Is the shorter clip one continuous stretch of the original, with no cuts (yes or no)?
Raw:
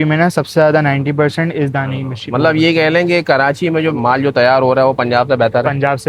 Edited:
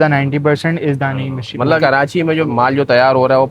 no